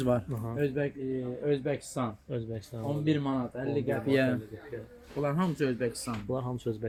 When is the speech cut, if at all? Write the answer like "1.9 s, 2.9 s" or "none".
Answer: none